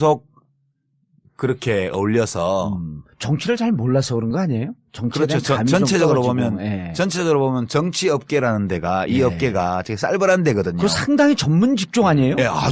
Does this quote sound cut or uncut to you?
uncut